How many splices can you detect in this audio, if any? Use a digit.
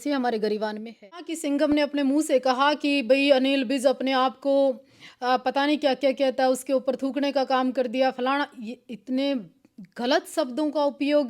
1